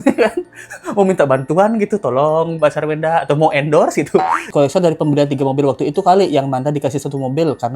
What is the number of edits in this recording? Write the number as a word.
one